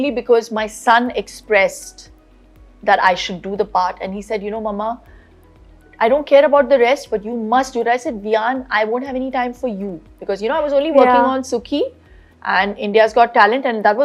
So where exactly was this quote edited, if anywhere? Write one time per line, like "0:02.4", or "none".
none

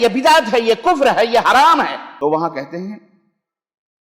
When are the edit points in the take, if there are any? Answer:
0:02.1

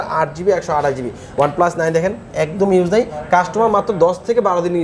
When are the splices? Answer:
0:01.2

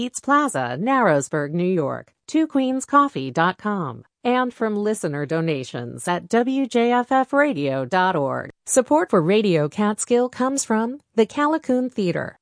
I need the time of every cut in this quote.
0:08.5

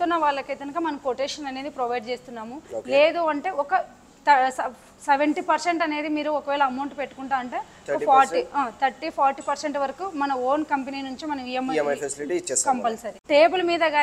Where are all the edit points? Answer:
0:13.1

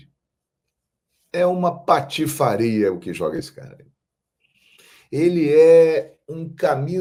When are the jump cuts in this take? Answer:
none

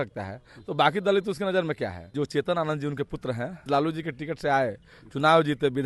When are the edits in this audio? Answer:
0:02.1
0:03.5

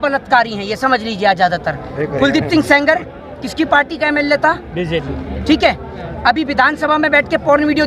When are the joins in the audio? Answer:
none

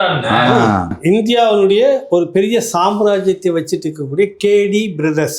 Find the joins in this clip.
0:00.9

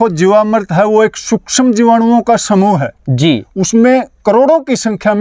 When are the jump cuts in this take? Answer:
none

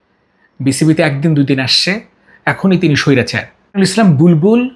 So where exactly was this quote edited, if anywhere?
0:03.7

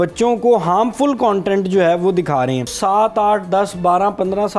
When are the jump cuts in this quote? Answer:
0:02.7

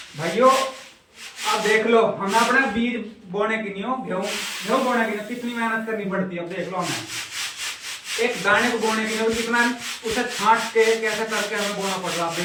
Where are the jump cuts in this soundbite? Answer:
none

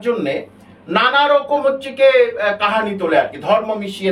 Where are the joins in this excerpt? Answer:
none

